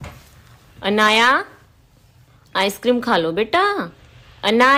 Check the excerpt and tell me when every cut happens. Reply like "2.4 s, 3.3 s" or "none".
none

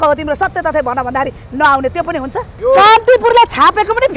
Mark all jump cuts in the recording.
2.5 s

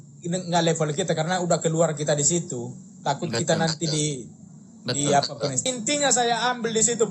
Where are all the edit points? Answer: 5.6 s

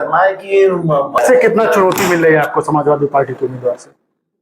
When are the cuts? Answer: 1.2 s

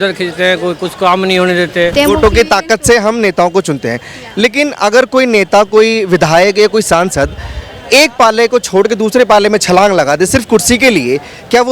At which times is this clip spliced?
1.9 s

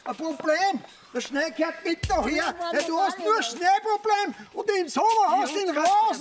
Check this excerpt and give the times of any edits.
none

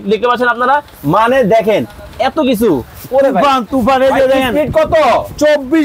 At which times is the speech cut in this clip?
none

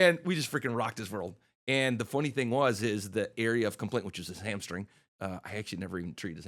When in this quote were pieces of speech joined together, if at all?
none

